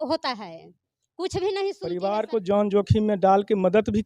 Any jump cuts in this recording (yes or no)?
yes